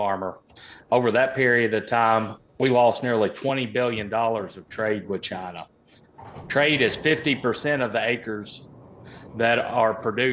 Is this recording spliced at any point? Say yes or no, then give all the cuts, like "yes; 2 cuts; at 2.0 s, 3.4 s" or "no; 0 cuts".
no; 0 cuts